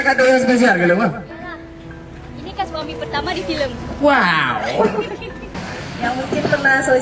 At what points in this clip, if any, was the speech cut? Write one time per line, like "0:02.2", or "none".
0:05.4